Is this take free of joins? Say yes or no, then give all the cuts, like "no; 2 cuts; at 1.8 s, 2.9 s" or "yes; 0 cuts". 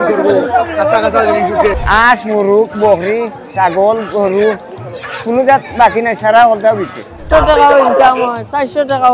no; 2 cuts; at 1.8 s, 7.3 s